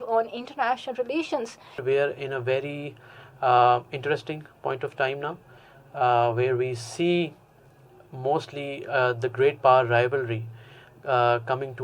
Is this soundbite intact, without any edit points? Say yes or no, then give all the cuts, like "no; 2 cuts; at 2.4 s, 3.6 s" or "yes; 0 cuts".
no; 1 cut; at 1.8 s